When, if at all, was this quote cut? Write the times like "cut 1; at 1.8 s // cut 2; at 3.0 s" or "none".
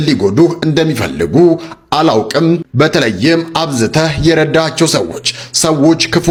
none